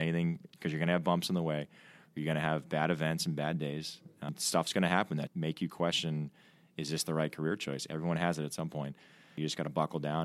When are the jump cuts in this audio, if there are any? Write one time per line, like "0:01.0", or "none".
0:04.0
0:05.3
0:09.3

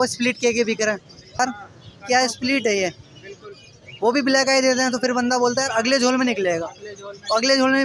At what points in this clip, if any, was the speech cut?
0:01.4

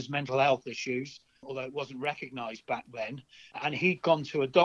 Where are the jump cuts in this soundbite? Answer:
0:01.5
0:03.6

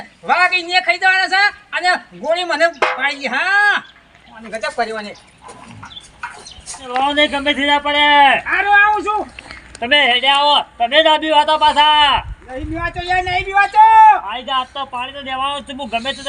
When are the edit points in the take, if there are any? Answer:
0:06.8

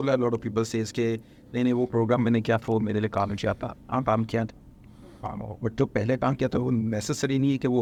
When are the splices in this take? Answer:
none

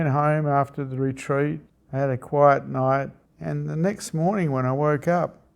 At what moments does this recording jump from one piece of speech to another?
0:01.7
0:03.2

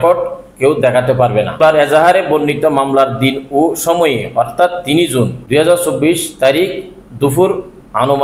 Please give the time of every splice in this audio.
0:01.6
0:05.4

